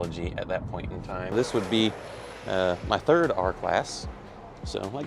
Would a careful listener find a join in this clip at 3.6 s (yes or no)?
no